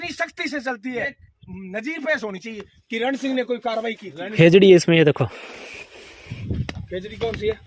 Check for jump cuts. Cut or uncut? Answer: cut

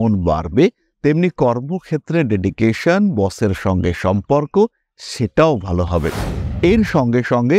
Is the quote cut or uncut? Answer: cut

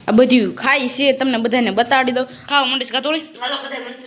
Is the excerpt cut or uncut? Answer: cut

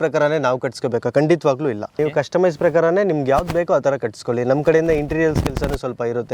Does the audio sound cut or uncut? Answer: cut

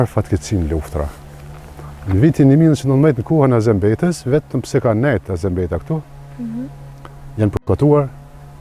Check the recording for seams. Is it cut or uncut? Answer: uncut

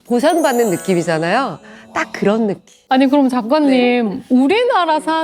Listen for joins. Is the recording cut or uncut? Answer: uncut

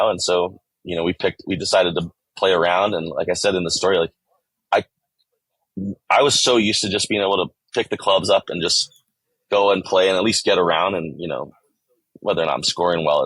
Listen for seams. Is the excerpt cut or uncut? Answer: uncut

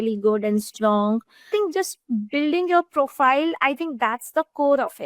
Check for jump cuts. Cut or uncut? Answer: cut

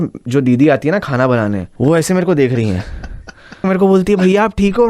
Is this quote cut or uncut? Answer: cut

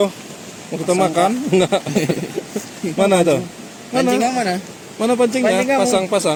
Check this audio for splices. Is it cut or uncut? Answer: uncut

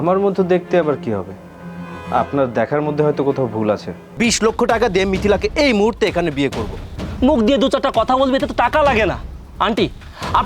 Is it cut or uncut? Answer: cut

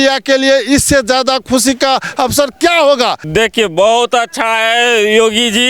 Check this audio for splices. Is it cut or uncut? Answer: cut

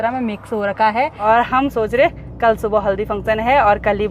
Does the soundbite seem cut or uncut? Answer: cut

